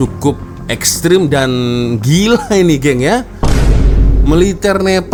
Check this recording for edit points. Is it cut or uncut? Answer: uncut